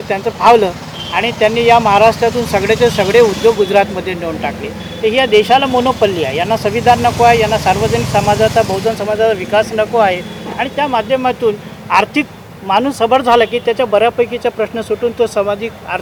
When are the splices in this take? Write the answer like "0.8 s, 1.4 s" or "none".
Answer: none